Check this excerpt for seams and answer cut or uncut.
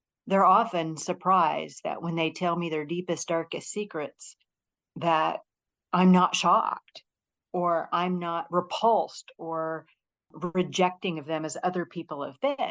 cut